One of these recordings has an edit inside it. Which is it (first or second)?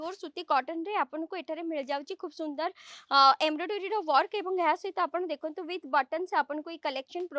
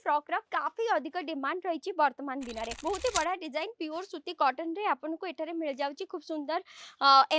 second